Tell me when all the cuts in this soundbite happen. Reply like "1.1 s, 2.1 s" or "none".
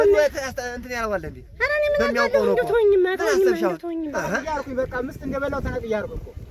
4.4 s